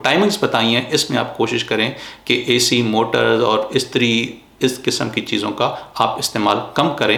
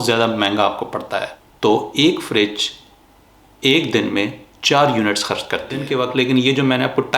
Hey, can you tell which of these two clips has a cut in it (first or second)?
second